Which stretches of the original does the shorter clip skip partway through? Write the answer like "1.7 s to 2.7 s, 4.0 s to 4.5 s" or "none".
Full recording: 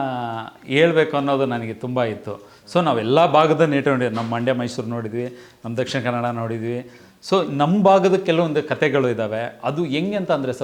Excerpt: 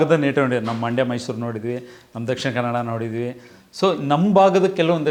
none